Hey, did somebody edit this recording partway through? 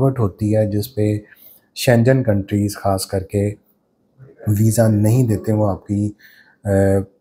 no; 0 cuts

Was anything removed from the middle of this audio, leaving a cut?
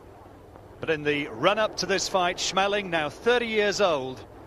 yes; 1 cut; at 1.3 s

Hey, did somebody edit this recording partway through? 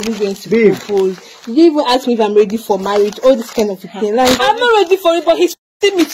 yes; 1 cut; at 4.4 s

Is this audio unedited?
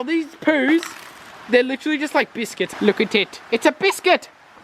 yes; 0 cuts

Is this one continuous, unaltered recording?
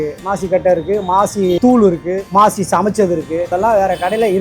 no; 1 cut; at 3.5 s

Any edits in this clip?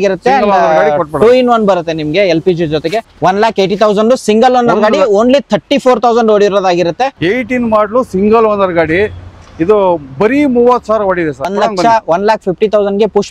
yes; 3 cuts; at 3.1 s, 7.1 s, 11.5 s

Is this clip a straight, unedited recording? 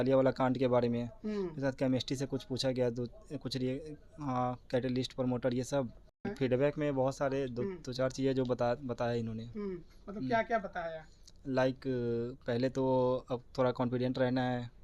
no; 1 cut; at 6.3 s

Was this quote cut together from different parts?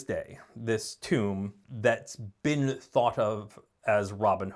yes; 1 cut; at 1.6 s

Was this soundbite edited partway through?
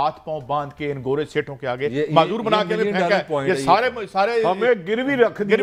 no; 0 cuts

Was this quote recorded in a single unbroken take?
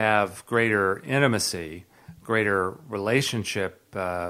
yes; 0 cuts

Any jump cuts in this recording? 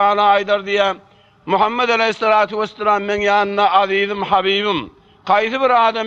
no; 0 cuts

